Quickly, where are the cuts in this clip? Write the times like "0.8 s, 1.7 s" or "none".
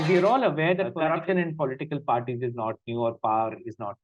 0.9 s

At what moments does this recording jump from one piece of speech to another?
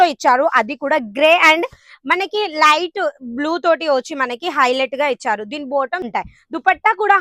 6.1 s

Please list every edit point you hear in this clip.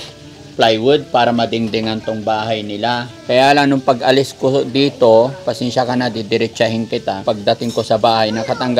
3.1 s, 7.2 s

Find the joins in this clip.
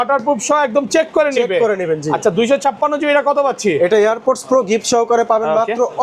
none

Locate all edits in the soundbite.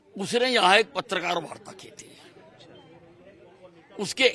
none

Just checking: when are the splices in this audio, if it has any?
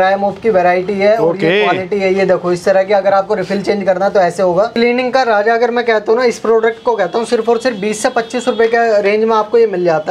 4.7 s

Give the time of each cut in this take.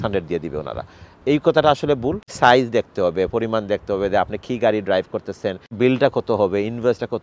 2.3 s, 5.8 s

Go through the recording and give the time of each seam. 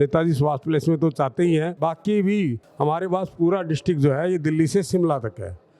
1.7 s, 2.6 s

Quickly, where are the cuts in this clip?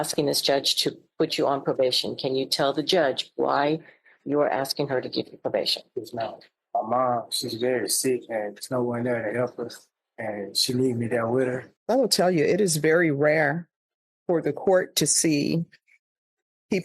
6.5 s, 11.7 s

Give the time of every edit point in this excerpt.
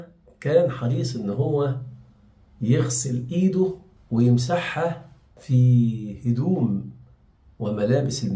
none

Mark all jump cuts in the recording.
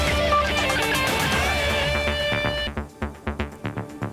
2.6 s

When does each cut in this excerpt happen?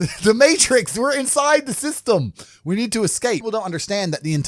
3.4 s

